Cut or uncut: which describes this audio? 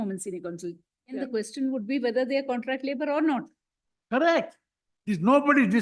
cut